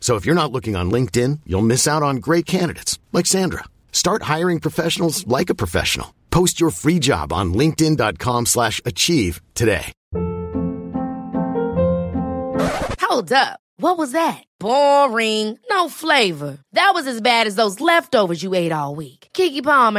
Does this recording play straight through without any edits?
no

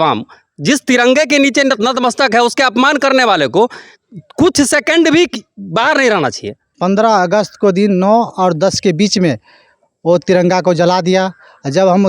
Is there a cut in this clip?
yes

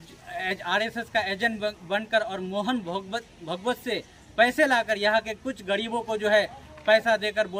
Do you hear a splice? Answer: no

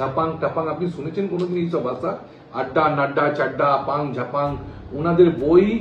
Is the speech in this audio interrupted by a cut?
no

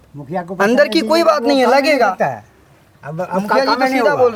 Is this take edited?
no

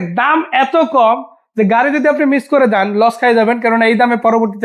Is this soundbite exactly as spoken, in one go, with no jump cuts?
yes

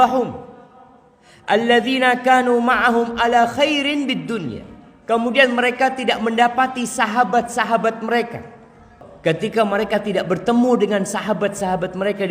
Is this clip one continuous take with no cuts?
no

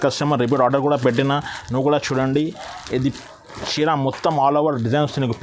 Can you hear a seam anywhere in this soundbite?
no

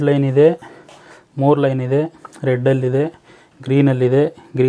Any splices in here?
no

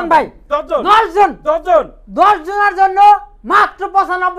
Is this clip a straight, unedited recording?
yes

